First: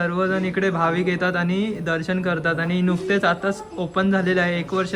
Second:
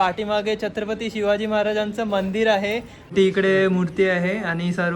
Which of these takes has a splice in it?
second; 1 cut; at 3.1 s

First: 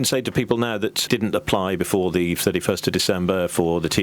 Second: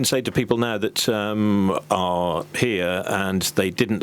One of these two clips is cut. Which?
first; 1 cut; at 1.0 s

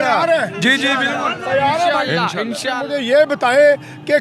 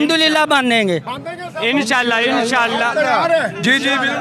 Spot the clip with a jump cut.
first; 1 cut; at 2.7 s

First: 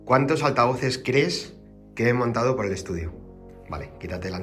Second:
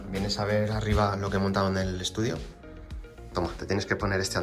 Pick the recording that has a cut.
first; 1 cut; at 3.5 s

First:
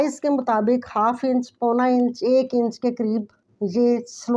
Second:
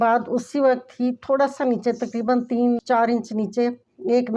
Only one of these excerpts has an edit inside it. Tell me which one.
second; 1 cut; at 2.8 s

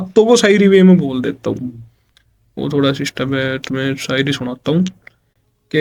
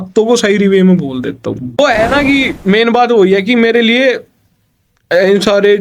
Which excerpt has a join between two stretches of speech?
second; 1 cut; at 1.8 s

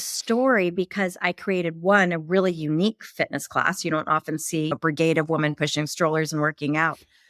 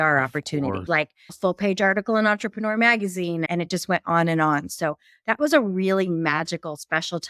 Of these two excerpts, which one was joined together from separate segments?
second; 1 cut; at 1.2 s

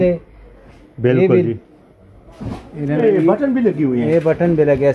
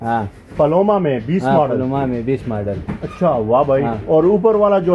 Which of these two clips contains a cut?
first; 1 cut; at 2.9 s

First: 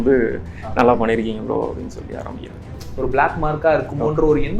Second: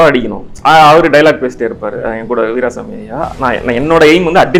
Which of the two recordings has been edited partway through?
first; 1 cut; at 2.7 s

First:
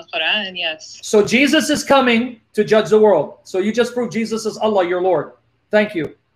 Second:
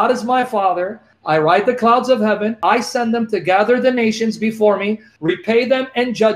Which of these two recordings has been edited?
second; 3 cuts; at 1.1 s, 2.6 s, 5.1 s

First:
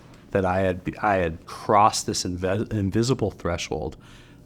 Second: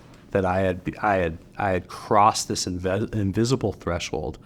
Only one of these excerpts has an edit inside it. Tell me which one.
first; 1 cut; at 1.5 s

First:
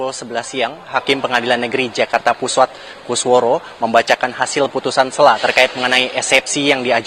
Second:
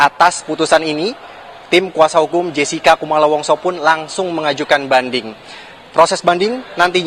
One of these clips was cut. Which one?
second; 1 cut; at 1.8 s

